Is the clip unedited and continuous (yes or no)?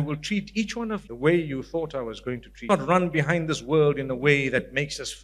no